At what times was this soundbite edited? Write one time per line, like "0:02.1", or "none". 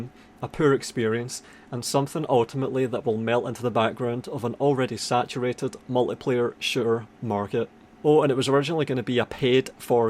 0:07.8

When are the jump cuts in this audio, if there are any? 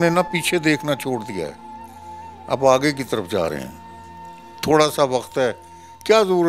none

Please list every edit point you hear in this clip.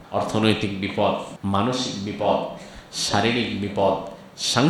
0:01.3

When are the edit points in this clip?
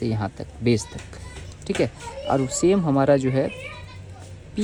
none

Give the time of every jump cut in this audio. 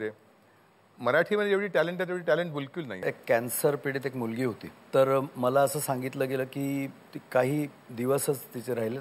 0:03.1
0:04.7

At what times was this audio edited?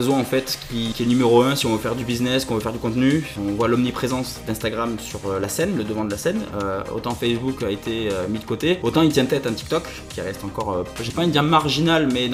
none

